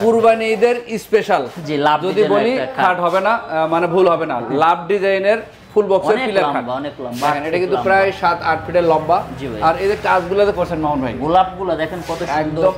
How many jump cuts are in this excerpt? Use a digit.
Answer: 0